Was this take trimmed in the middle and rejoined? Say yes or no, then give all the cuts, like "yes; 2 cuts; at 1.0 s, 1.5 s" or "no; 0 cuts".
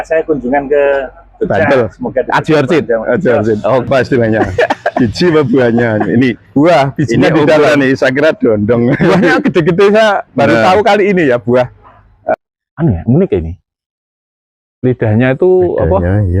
yes; 2 cuts; at 3.9 s, 12.3 s